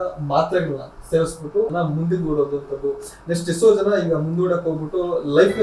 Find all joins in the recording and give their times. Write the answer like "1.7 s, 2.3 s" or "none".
1.7 s